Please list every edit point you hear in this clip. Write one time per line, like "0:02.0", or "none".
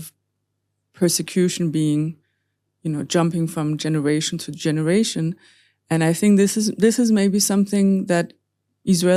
none